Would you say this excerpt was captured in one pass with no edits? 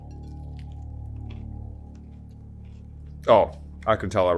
yes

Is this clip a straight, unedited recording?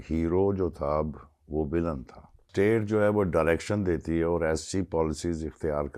no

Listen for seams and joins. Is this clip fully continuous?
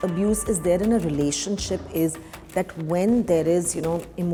yes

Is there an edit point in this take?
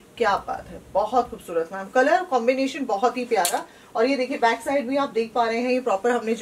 no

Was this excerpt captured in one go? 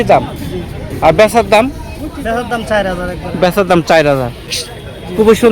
no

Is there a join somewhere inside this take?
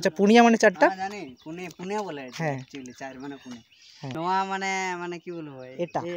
yes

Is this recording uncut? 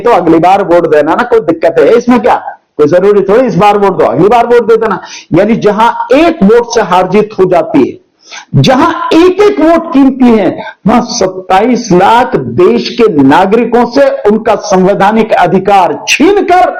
yes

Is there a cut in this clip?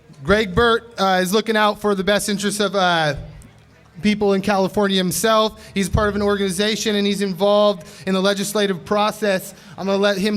yes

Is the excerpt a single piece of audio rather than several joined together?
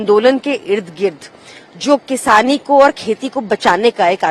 yes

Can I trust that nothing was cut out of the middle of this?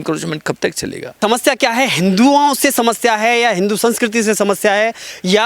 no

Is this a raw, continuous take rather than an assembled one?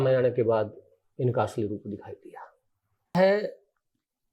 no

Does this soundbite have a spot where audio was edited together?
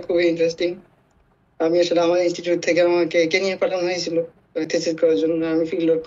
no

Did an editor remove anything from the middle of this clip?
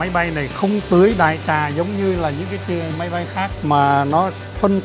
no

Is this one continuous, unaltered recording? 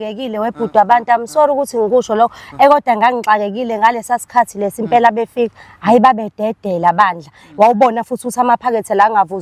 yes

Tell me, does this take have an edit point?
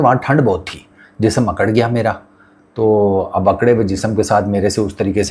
no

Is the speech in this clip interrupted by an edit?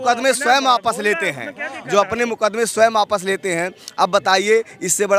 no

